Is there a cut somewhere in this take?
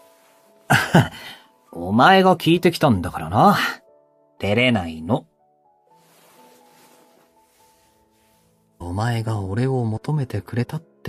no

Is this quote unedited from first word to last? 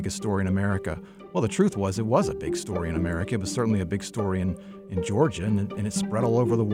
yes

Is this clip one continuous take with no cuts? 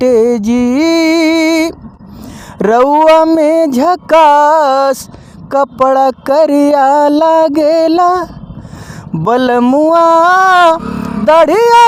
yes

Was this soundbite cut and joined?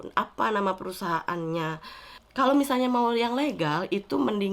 yes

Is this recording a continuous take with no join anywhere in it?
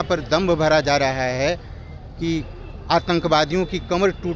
yes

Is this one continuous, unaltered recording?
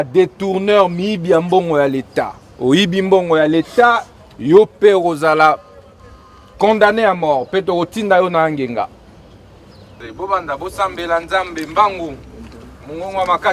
no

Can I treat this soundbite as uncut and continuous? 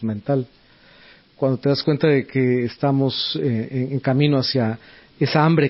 yes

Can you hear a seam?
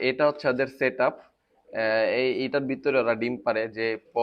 no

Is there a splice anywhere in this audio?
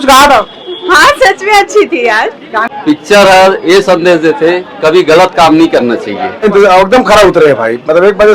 yes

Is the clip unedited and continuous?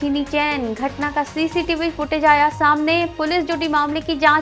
yes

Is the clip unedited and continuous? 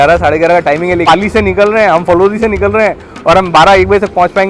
no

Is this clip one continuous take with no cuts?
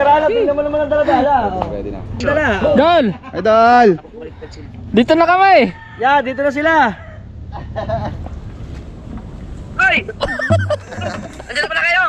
no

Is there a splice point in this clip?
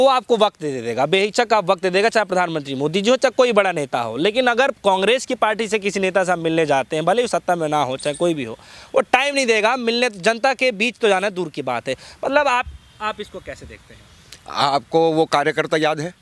no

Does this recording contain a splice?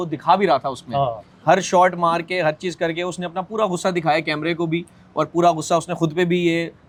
no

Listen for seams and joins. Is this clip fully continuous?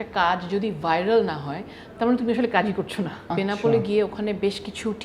no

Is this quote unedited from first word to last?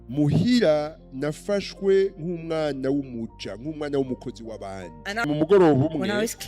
no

